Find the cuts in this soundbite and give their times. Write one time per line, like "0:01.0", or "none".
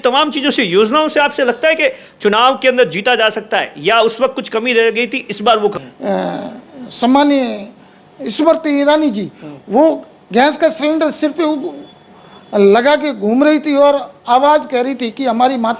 0:05.7